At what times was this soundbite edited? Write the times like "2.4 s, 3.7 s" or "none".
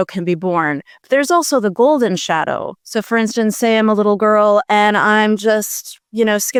none